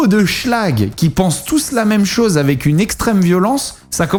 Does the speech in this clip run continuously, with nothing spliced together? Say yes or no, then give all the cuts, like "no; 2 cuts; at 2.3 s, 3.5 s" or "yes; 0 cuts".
yes; 0 cuts